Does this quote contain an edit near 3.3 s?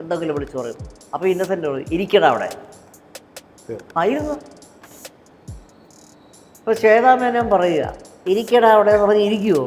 no; 0 cuts

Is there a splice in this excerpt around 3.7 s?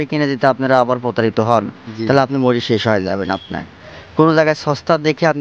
yes; 1 cut; at 3.7 s

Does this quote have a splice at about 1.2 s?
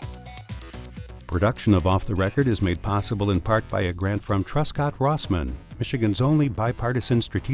yes; 1 cut; at 1.2 s

